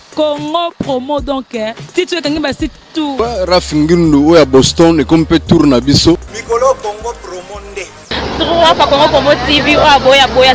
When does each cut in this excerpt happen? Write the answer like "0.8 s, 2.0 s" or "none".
3.1 s, 6.3 s